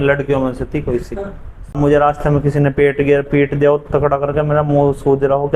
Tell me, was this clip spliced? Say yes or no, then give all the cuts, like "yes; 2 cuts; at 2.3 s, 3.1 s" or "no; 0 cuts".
yes; 1 cut; at 1.8 s